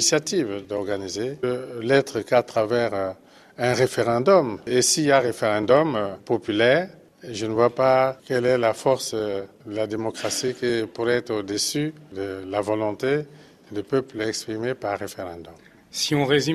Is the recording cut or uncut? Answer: uncut